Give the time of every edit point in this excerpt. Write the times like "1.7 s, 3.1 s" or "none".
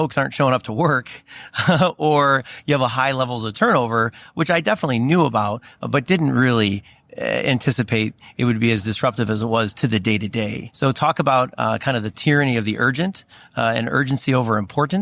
10.6 s